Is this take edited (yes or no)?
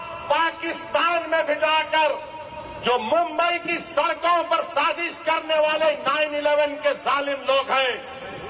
no